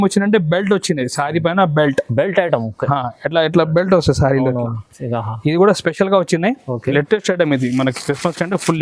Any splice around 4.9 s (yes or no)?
no